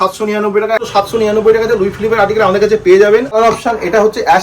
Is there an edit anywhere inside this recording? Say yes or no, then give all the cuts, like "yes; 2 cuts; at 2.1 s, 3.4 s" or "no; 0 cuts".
yes; 2 cuts; at 0.9 s, 3.4 s